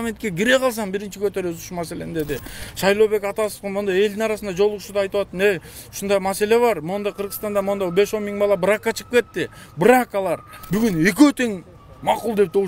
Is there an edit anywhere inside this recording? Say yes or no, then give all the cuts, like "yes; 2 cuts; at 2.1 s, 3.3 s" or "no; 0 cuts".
yes; 1 cut; at 10.5 s